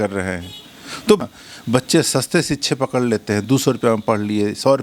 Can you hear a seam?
yes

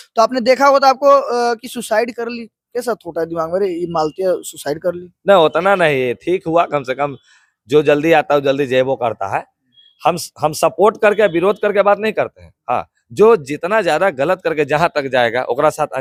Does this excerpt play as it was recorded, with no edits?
yes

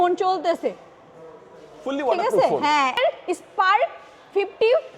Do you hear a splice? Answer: yes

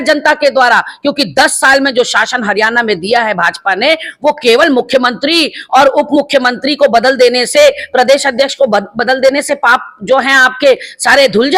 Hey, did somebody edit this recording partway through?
no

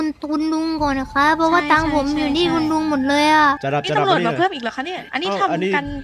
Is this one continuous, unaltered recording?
no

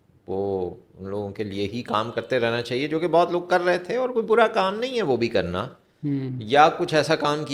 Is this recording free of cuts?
yes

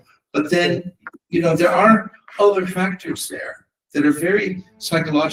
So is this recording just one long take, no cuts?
yes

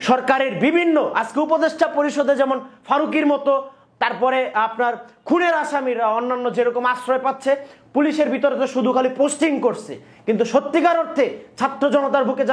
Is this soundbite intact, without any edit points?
yes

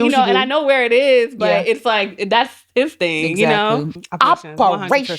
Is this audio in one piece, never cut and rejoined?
no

